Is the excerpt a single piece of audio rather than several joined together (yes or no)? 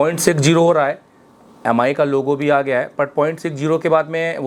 yes